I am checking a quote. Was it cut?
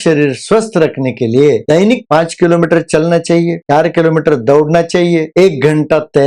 yes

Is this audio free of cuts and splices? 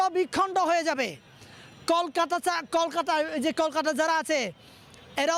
yes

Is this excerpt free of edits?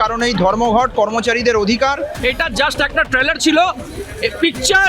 no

